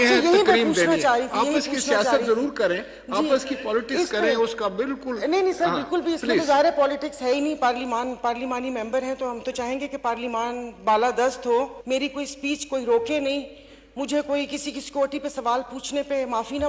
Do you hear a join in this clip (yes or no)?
yes